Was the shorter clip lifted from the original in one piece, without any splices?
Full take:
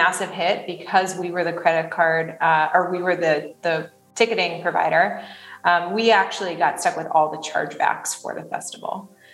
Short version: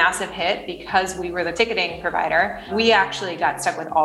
no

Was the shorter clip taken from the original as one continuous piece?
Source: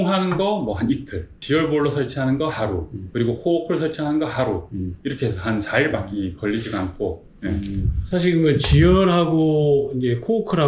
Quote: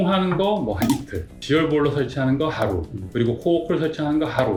yes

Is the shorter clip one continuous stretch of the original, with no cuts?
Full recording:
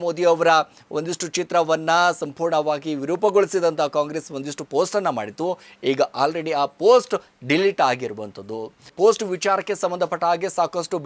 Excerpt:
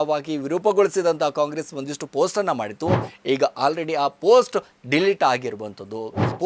yes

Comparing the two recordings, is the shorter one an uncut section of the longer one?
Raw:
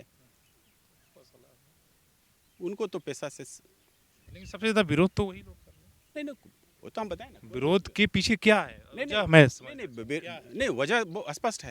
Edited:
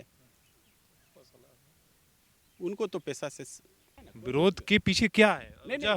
no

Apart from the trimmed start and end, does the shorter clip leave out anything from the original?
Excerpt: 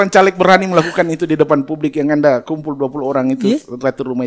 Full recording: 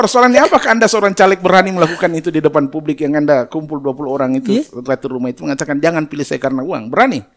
no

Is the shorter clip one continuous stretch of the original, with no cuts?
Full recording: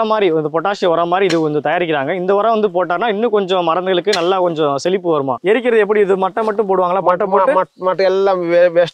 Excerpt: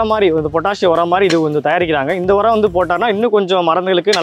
yes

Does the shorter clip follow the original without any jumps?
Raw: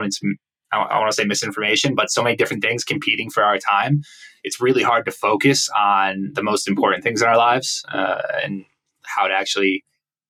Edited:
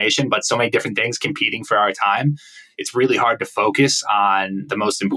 yes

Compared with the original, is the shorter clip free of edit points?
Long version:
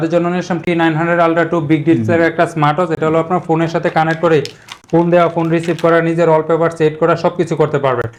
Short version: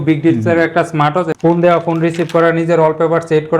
no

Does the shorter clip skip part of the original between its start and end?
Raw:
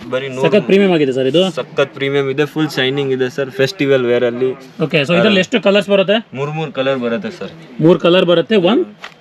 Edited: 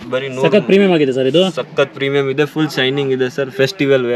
no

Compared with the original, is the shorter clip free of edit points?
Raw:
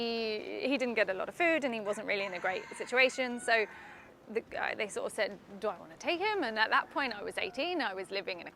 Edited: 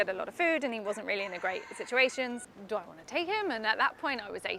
no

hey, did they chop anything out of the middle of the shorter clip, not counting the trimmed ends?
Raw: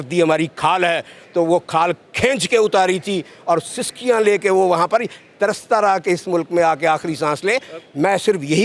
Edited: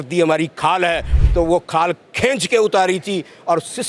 no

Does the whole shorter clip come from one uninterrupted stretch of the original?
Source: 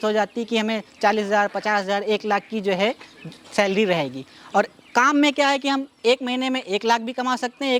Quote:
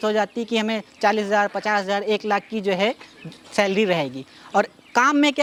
yes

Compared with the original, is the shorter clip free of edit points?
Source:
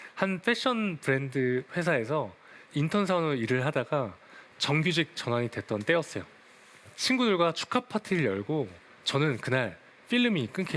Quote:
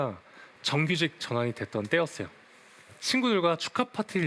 yes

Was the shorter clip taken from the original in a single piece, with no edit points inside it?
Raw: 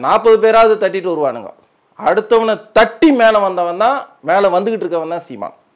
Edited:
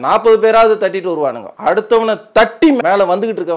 no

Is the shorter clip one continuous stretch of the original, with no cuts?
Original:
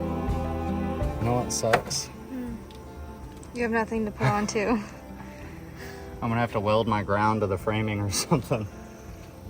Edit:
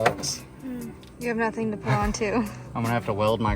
no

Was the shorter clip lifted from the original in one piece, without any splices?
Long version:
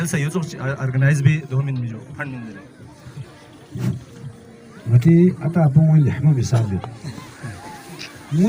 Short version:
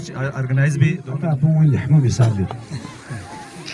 no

